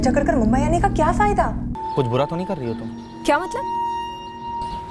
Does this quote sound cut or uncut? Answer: cut